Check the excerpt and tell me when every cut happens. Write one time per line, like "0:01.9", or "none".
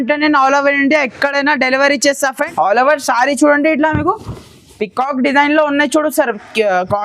0:02.4

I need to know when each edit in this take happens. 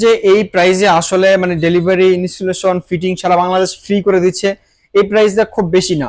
none

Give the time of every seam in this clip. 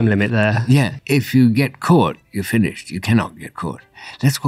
0:01.0

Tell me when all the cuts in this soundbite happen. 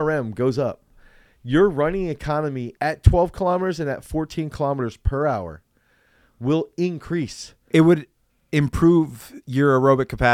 0:02.7
0:07.6

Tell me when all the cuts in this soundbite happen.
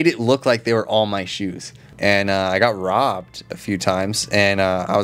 0:01.9

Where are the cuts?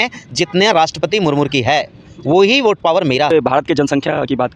0:03.3

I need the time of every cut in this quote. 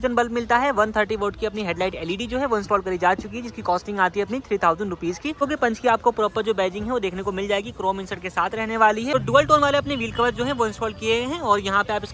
0:05.4
0:09.1

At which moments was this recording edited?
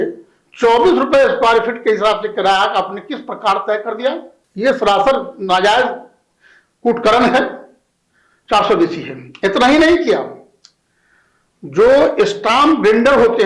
0:04.4

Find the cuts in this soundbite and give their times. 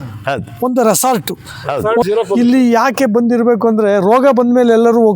0:02.0

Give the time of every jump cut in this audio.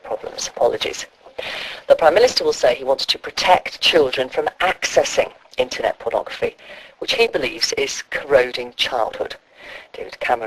0:08.7

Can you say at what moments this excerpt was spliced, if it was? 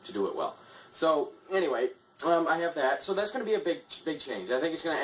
0:03.4

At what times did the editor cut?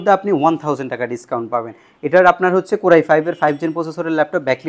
none

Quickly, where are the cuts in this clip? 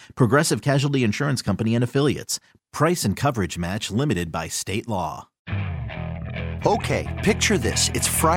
0:05.3

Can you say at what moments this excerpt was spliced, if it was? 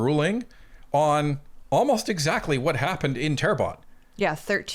none

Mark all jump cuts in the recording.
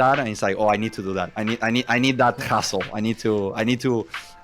0:01.3

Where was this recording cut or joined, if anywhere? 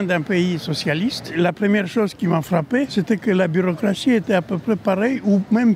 0:01.3
0:02.9

